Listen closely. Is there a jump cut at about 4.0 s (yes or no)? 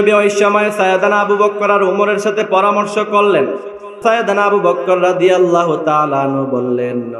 yes